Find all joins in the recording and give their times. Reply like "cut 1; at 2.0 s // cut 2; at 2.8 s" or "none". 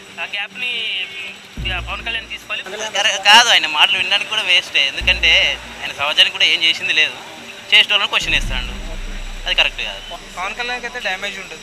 cut 1; at 2.7 s // cut 2; at 10.2 s